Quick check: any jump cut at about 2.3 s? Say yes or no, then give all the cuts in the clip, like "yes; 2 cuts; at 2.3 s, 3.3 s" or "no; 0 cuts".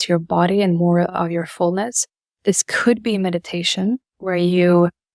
no; 1 cut; at 4.1 s